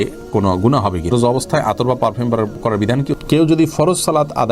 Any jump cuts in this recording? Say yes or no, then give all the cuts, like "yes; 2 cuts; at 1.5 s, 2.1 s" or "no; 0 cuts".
yes; 2 cuts; at 1.1 s, 3.1 s